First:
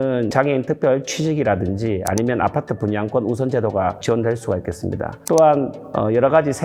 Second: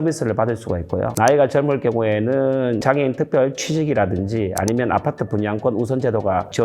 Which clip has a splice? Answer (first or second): second